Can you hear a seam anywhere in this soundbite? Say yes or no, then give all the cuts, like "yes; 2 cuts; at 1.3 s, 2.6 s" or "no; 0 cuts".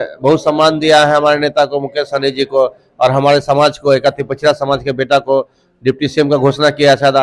no; 0 cuts